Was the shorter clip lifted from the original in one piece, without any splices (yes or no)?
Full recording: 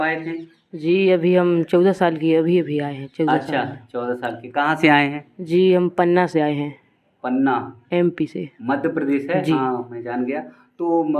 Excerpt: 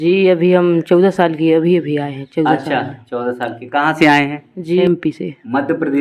no